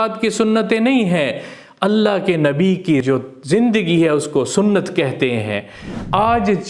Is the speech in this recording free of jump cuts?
no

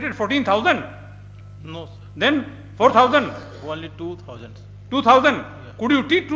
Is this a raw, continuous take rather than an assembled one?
yes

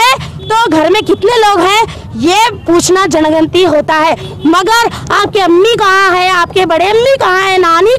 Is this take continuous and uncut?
yes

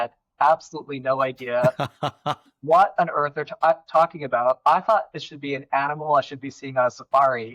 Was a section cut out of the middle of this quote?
no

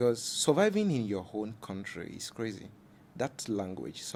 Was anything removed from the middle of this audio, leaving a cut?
no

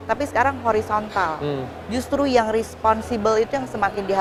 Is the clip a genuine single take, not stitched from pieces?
yes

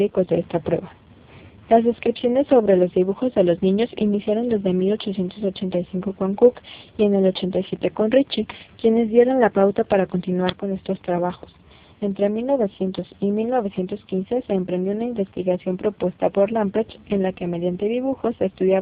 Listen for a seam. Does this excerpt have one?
yes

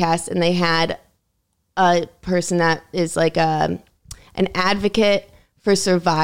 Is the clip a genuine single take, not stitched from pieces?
yes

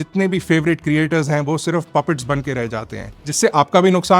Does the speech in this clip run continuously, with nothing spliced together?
no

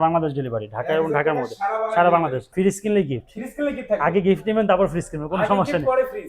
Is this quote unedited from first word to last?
no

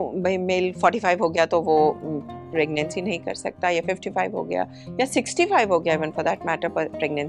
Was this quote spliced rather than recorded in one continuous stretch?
no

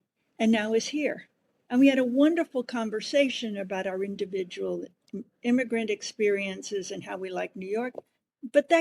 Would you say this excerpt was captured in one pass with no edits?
yes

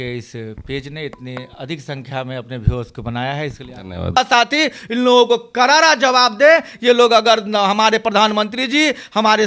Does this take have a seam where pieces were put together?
yes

